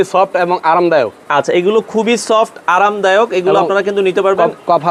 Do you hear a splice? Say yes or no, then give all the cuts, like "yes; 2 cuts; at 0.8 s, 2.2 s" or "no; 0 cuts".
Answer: no; 0 cuts